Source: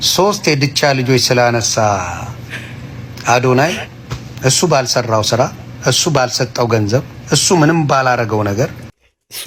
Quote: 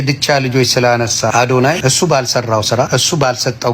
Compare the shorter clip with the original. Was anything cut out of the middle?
yes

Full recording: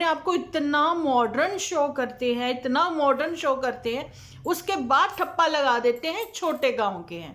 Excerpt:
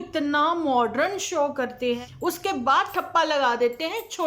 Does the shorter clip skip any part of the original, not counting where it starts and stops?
yes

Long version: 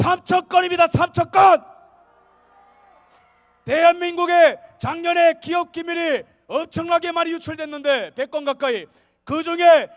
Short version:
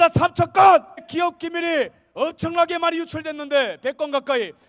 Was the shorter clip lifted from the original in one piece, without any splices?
no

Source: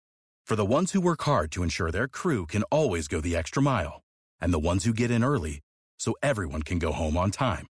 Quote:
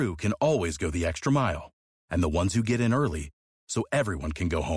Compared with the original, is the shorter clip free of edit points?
yes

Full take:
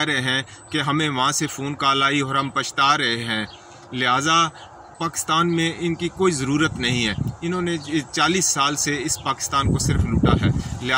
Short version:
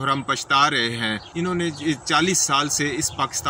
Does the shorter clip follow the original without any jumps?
no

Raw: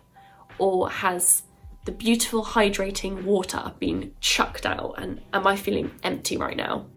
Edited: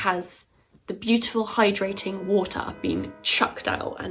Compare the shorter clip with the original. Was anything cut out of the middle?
no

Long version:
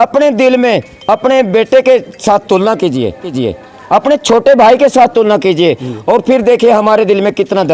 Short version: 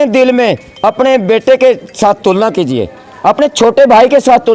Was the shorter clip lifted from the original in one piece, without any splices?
no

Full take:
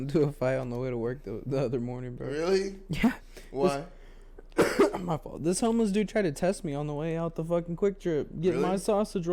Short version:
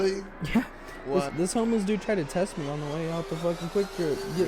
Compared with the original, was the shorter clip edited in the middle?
yes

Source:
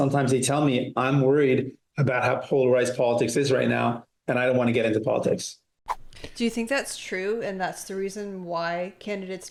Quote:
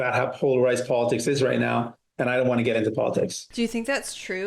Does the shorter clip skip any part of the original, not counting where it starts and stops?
yes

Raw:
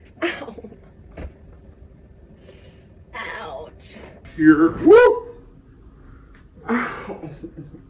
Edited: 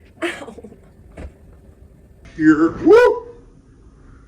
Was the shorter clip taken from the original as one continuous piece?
no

